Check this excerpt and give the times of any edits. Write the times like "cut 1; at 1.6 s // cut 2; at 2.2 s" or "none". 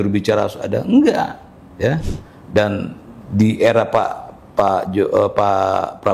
cut 1; at 2.0 s